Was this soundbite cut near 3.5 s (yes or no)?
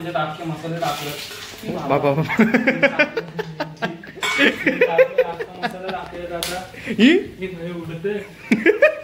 no